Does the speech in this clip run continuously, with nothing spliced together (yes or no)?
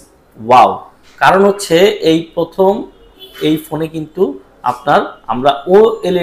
yes